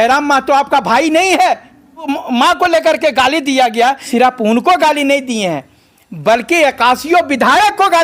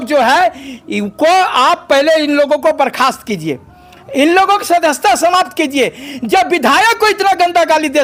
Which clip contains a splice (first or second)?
first